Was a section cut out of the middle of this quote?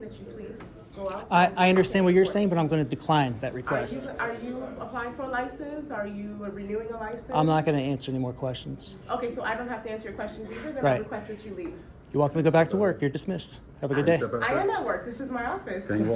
no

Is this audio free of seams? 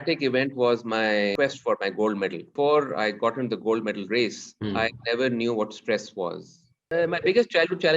no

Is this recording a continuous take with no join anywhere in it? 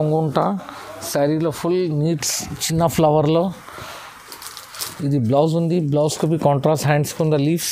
yes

